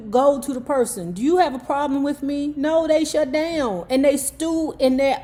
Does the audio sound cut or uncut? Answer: uncut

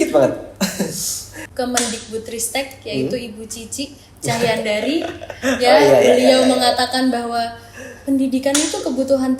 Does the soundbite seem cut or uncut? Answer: cut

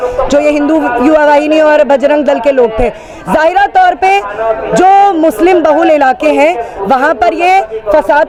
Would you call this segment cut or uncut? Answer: uncut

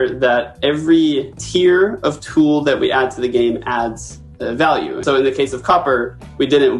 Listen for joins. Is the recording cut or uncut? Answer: cut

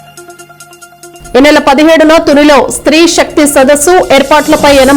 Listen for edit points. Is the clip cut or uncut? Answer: cut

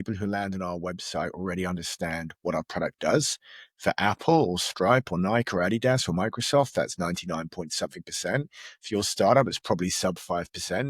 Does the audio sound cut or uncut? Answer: uncut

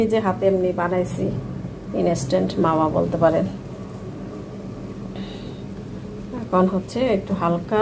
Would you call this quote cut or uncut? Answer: uncut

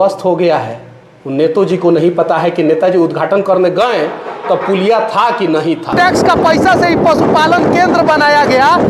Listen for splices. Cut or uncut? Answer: cut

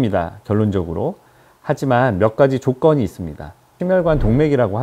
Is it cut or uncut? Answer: cut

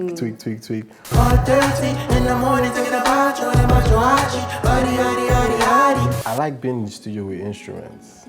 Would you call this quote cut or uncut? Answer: cut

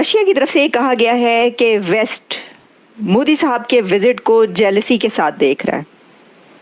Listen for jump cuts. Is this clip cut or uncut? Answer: uncut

